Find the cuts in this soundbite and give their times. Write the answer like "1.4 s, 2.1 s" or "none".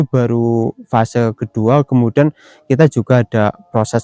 none